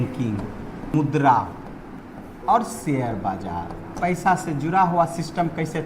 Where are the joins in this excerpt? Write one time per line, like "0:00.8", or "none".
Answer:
0:00.9
0:01.9
0:03.9